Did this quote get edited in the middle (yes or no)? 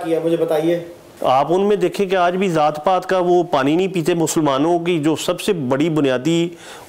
yes